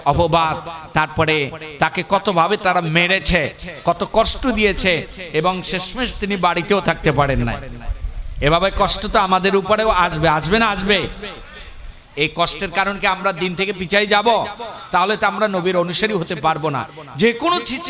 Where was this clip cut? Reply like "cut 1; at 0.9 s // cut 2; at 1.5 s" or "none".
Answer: none

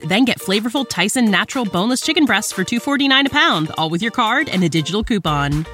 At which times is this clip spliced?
none

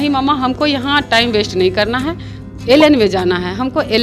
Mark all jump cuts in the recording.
none

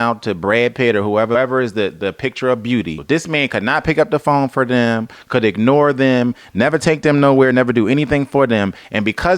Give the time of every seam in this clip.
cut 1; at 1.3 s // cut 2; at 3.0 s

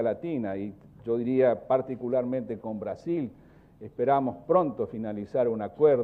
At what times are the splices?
cut 1; at 2.3 s

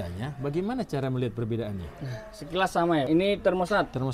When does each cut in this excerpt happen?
cut 1; at 3.1 s

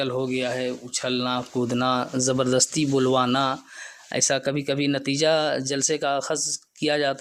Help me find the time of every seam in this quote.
none

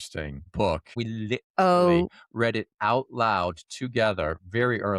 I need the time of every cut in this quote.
cut 1; at 0.9 s

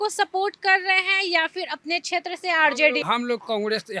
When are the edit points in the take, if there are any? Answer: cut 1; at 3.0 s

